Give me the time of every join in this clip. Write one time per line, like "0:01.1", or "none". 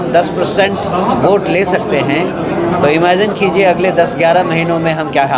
none

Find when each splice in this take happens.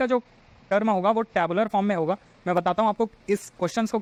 none

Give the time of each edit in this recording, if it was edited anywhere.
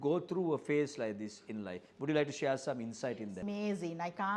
0:03.4

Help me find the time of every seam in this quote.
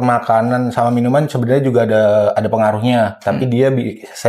none

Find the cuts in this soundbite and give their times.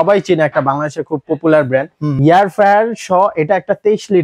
0:02.1

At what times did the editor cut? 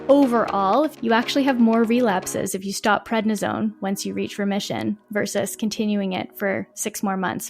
0:00.9

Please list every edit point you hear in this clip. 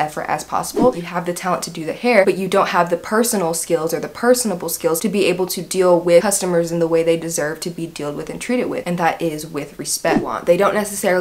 0:00.9
0:10.2

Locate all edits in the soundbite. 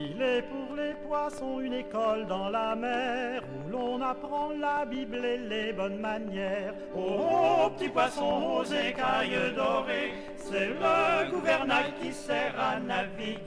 none

